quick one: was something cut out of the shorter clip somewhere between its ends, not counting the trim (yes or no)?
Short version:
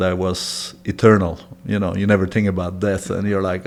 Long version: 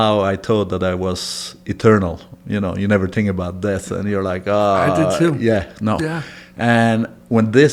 no